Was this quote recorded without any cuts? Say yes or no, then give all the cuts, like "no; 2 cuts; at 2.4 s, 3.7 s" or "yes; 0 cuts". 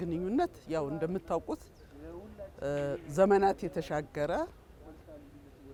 yes; 0 cuts